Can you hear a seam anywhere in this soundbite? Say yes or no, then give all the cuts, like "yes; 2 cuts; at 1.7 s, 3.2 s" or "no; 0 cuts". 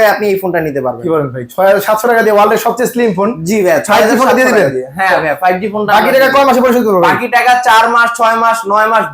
no; 0 cuts